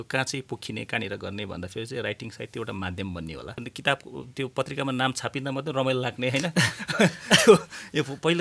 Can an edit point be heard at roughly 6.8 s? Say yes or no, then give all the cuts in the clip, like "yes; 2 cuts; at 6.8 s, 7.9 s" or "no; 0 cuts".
no; 1 cut; at 3.7 s